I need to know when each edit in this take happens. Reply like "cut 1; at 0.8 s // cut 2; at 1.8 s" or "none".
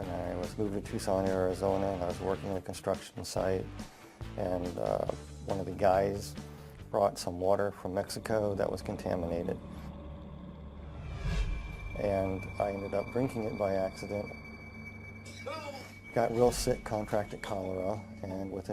cut 1; at 9.8 s